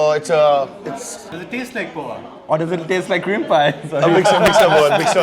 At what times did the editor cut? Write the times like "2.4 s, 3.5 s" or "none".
1.4 s

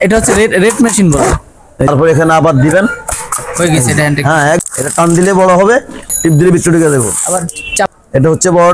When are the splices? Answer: 1.7 s, 4.6 s, 6.1 s, 7.9 s

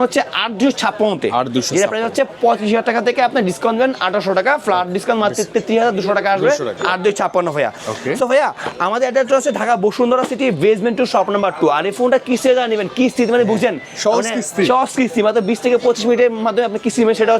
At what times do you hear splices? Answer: none

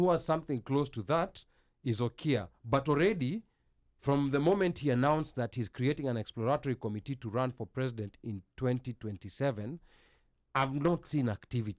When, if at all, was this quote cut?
none

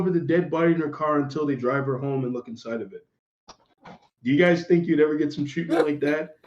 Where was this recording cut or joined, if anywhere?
none

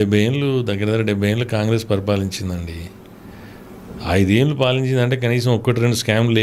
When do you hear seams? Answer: none

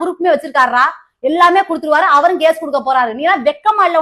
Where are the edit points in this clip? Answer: none

